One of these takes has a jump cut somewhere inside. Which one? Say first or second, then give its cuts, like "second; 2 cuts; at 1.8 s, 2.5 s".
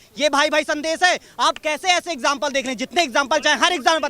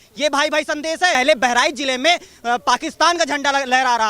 second; 1 cut; at 1.1 s